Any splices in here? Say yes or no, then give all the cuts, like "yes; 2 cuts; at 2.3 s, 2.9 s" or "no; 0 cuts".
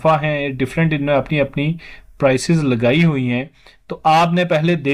no; 0 cuts